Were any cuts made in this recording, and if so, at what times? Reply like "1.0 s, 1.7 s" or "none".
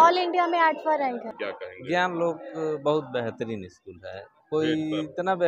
1.4 s